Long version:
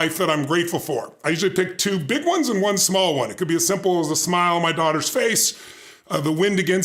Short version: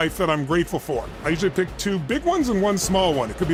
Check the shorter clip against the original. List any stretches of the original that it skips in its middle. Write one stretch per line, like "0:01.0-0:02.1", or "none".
none